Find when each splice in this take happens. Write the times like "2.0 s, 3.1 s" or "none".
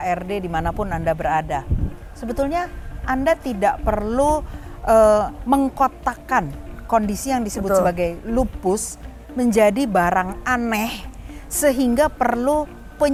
none

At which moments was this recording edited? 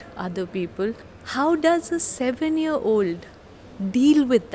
1.1 s

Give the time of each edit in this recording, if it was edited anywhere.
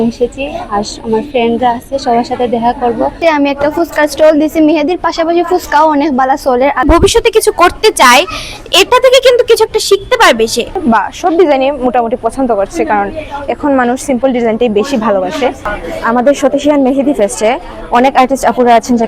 3.2 s, 6.8 s, 10.8 s, 15.7 s

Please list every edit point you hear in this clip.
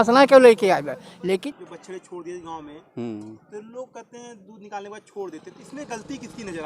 1.4 s

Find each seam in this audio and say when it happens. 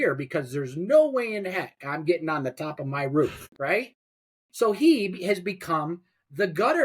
3.5 s

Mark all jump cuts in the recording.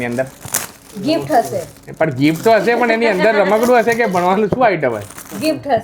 none

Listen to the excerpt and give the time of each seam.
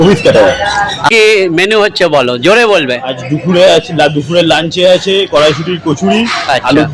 1.1 s

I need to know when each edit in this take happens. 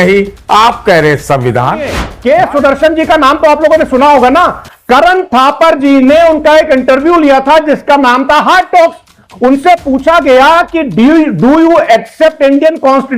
2.1 s

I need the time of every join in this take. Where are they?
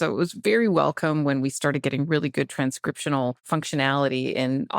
3.4 s

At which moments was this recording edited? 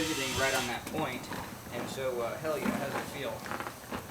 1.6 s

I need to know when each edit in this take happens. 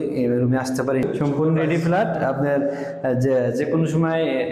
1.0 s

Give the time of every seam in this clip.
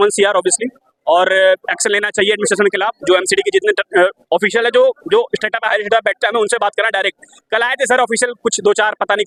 none

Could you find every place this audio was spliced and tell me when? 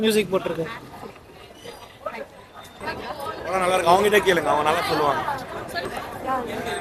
none

